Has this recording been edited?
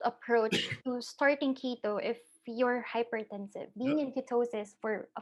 yes; 1 cut; at 3.7 s

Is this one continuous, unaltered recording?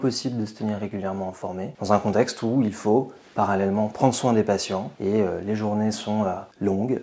yes; 0 cuts

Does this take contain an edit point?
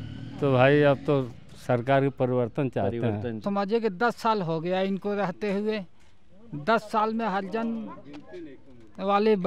yes; 1 cut; at 3.4 s

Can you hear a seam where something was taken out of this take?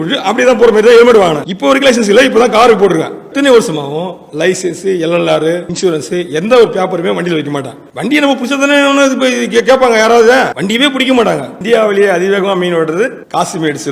no; 0 cuts

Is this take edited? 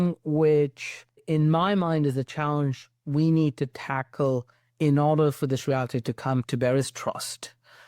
yes; 2 cuts; at 1.2 s, 6.5 s

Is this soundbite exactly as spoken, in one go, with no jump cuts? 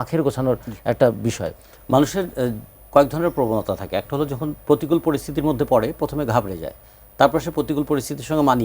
no; 1 cut; at 1.7 s

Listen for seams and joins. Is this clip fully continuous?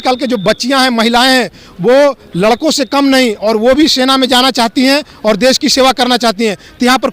yes; 0 cuts

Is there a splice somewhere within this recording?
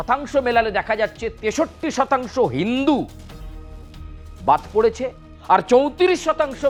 no; 0 cuts

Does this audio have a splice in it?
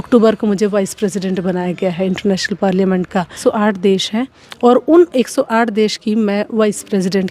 yes; 1 cut; at 3.4 s

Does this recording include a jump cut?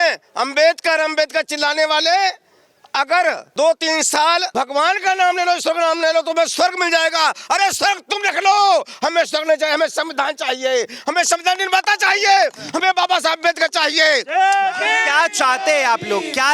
yes; 2 cuts; at 3.4 s, 4.5 s

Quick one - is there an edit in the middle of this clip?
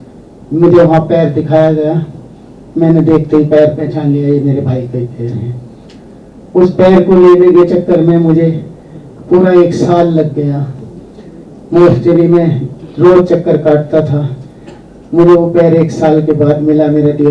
no; 0 cuts

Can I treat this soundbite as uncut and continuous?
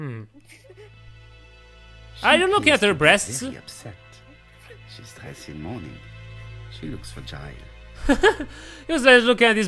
yes; 0 cuts

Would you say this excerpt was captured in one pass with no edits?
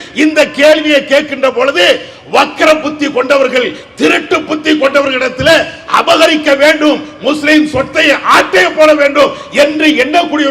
yes; 0 cuts

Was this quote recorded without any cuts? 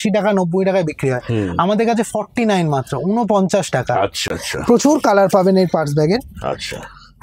yes; 0 cuts

